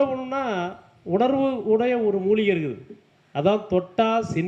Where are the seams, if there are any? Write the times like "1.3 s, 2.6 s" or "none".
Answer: none

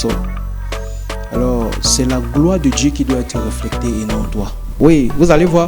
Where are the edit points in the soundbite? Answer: 4.6 s

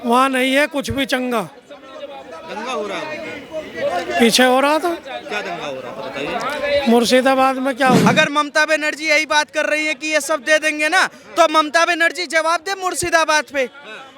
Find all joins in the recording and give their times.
8.1 s

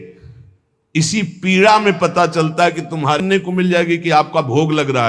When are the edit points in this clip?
3.2 s

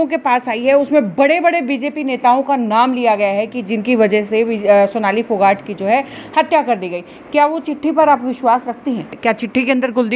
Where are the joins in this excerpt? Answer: 9.1 s

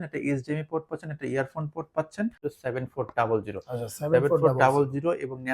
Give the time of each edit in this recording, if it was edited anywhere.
2.4 s

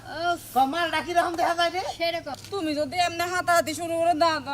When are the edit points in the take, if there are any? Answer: 2.3 s

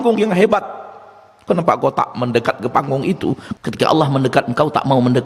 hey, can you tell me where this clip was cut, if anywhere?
3.4 s

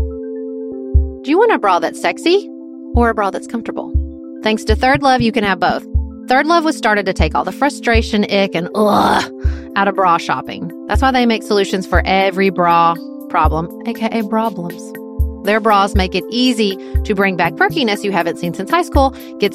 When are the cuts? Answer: 1.1 s

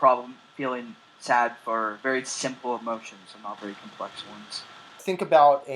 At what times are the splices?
2.0 s, 5.0 s

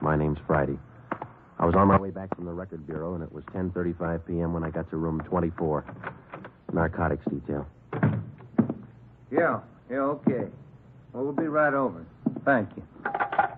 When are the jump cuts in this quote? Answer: 5.9 s

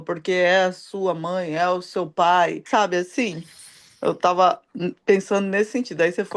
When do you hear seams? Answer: 2.6 s

